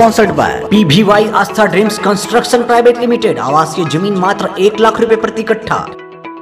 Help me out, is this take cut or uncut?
uncut